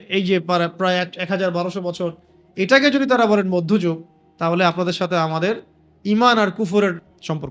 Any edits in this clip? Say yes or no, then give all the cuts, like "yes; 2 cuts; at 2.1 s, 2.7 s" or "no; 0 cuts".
no; 0 cuts